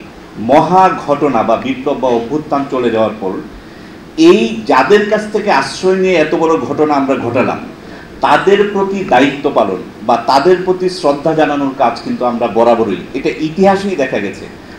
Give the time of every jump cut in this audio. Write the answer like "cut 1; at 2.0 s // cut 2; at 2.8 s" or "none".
none